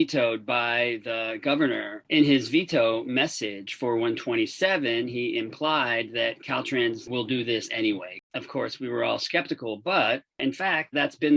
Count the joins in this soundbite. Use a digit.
2